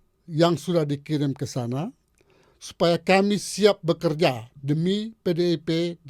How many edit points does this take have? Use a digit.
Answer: 0